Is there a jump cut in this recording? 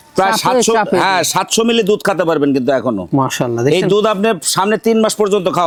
no; 0 cuts

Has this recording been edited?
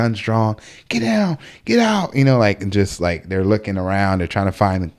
no; 0 cuts

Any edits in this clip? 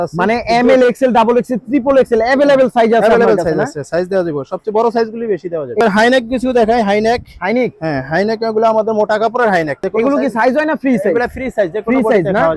yes; 2 cuts; at 5.8 s, 9.8 s

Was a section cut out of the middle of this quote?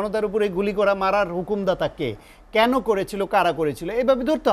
no; 0 cuts

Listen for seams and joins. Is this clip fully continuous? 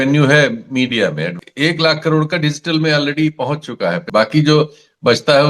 no; 2 cuts; at 1.4 s, 4.0 s

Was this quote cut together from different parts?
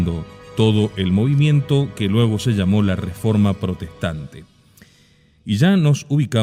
no; 0 cuts

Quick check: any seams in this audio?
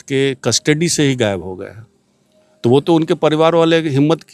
no; 0 cuts

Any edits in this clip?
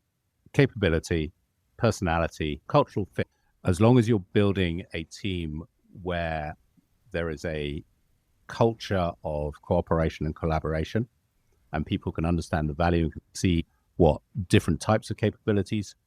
yes; 2 cuts; at 3.3 s, 13.2 s

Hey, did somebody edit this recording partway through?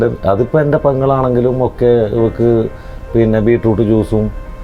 no; 0 cuts

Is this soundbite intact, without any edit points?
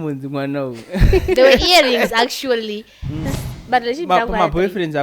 no; 1 cut; at 3.4 s

